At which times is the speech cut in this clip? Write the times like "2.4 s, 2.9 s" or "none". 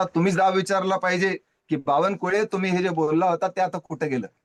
none